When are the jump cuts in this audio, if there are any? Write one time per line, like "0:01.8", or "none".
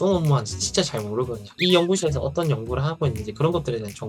0:01.5